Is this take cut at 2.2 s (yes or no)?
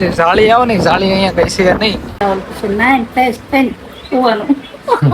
yes